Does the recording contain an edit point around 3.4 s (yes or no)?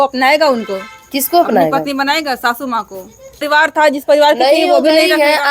yes